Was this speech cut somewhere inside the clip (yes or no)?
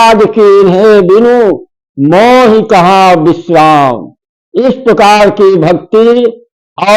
no